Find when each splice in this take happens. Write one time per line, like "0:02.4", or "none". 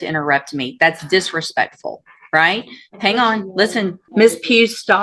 0:04.0